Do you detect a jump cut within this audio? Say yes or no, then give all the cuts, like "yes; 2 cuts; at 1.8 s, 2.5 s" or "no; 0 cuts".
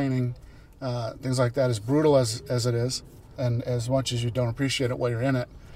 yes; 1 cut; at 3.3 s